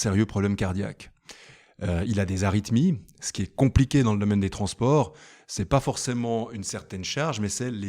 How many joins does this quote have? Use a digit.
0